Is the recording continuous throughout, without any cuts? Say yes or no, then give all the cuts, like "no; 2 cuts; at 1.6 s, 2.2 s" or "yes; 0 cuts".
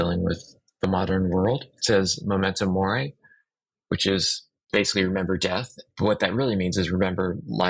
no; 1 cut; at 1.7 s